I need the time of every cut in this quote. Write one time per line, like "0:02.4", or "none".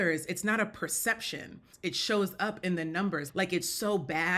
0:01.7
0:03.2